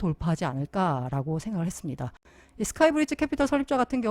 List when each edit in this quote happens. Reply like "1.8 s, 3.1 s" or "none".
2.2 s